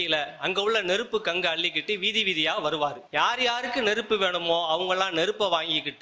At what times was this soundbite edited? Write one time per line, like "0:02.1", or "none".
0:03.0